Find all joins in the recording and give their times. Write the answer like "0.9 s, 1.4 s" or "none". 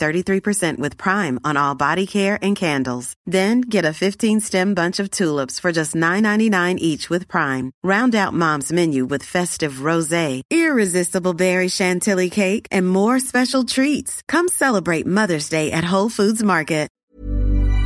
16.9 s